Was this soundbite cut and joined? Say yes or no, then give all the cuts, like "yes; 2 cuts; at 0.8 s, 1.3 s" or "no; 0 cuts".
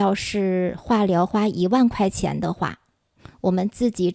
no; 0 cuts